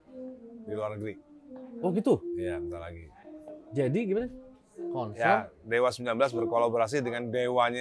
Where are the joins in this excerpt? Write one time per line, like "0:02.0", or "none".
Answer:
none

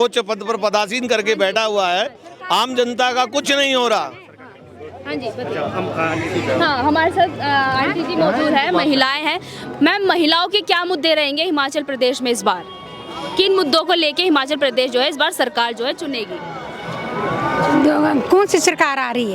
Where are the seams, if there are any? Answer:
none

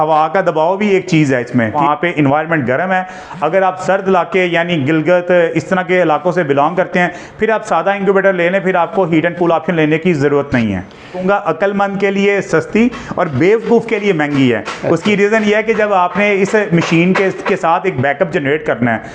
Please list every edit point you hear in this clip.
0:01.7
0:11.2

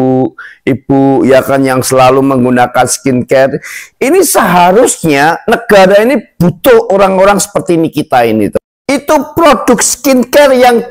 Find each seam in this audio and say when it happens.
0:08.6

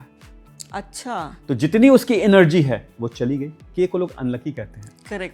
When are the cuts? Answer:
0:03.6

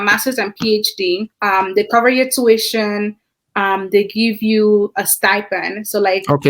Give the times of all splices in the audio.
0:01.3

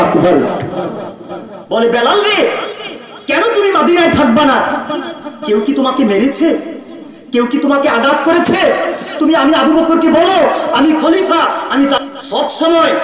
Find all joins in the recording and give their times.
0:12.0

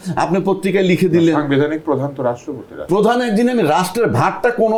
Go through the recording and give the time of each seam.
none

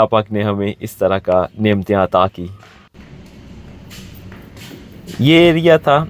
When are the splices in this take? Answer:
none

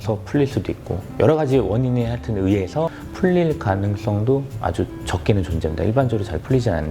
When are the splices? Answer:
none

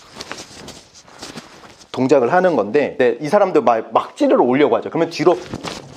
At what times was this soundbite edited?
0:03.0

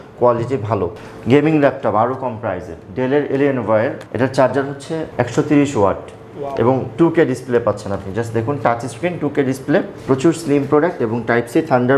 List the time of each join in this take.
0:01.0
0:10.0

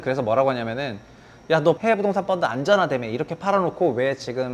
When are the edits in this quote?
0:01.8

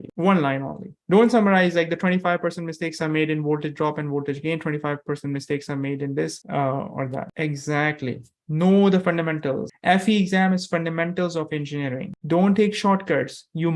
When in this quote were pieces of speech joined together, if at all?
0:01.0
0:12.2

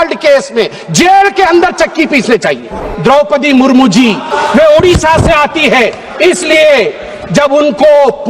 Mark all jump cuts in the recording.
0:02.8
0:04.3

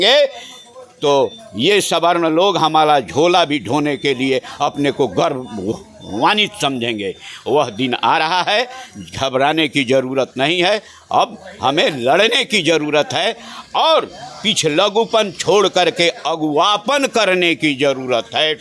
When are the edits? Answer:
none

